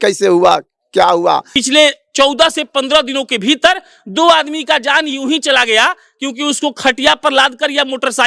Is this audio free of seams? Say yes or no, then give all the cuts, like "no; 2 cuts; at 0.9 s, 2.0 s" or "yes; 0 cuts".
no; 1 cut; at 1.5 s